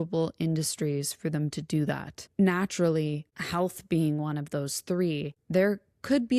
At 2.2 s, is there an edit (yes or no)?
yes